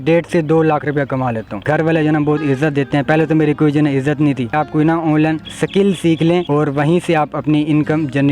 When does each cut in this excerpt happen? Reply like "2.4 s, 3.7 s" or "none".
1.6 s, 4.5 s, 5.5 s, 6.5 s